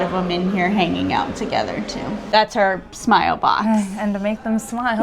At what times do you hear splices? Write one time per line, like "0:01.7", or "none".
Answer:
0:02.2